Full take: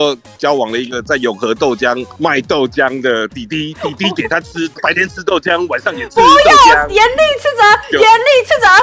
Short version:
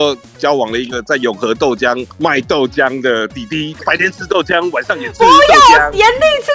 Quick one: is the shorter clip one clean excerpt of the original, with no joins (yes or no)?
no